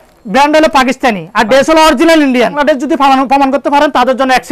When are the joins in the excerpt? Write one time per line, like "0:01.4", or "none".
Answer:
0:02.6